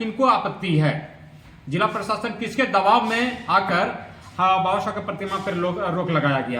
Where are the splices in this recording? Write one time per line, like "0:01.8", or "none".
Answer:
none